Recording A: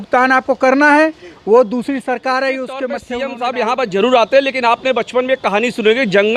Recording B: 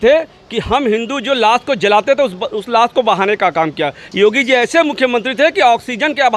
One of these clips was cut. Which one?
A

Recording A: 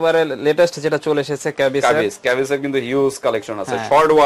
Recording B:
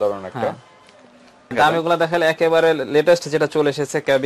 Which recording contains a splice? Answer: B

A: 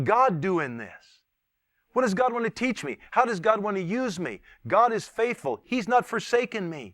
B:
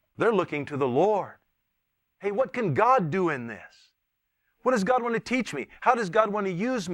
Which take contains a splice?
A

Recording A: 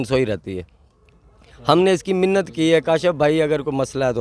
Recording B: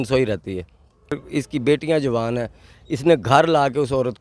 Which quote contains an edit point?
B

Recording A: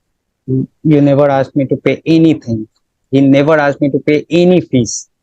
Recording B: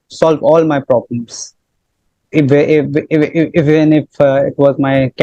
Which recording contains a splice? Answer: A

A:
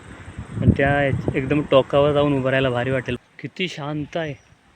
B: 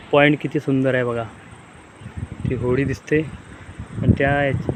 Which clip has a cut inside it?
A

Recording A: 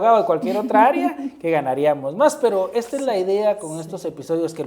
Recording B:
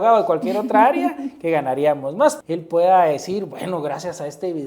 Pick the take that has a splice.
B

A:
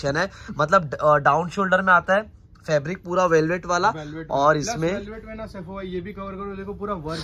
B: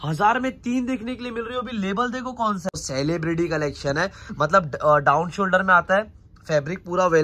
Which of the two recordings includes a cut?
B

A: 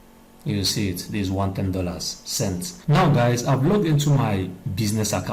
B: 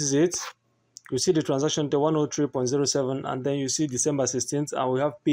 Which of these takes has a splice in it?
A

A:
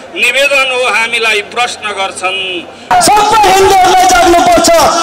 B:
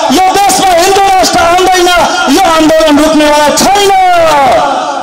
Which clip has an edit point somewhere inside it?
A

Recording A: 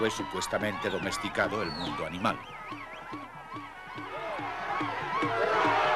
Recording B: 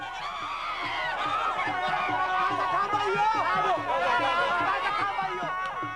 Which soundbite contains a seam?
B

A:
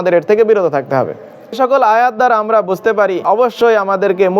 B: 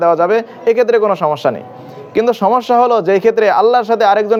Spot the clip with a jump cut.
A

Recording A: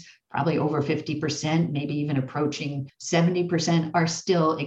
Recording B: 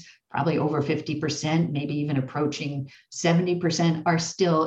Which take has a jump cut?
A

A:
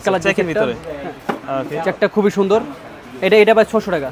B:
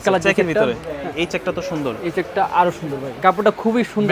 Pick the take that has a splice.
B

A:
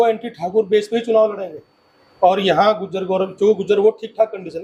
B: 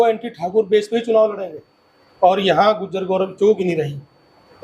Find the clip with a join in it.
B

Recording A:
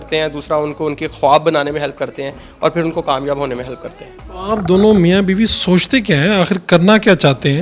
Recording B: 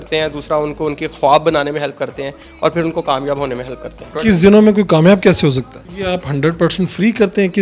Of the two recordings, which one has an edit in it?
B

